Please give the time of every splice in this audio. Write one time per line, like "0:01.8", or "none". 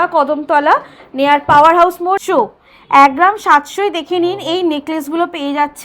0:02.2

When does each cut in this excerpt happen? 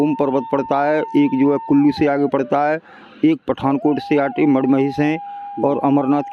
none

